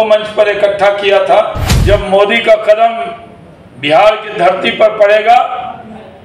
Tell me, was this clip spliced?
yes; 1 cut; at 1.7 s

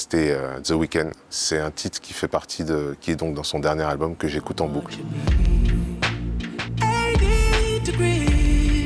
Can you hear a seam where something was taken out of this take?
yes; 1 cut; at 1.3 s

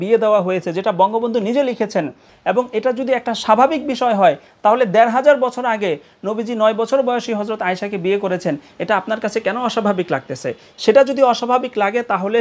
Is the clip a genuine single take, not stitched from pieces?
no; 1 cut; at 2.3 s

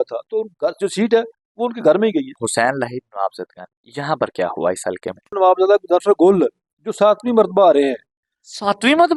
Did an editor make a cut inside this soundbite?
yes; 2 cuts; at 2.4 s, 5.4 s

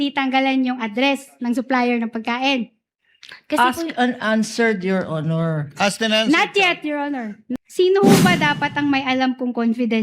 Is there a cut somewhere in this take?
yes; 1 cut; at 7.4 s

